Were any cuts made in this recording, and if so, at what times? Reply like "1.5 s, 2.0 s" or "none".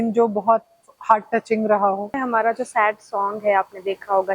2.2 s